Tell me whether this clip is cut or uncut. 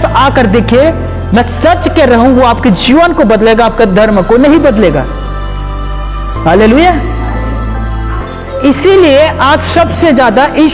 uncut